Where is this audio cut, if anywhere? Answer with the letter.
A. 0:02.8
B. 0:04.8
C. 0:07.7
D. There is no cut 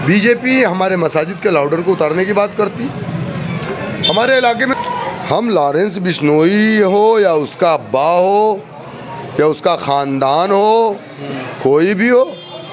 B